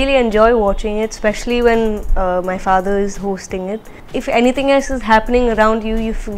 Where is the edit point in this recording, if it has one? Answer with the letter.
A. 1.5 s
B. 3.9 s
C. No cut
B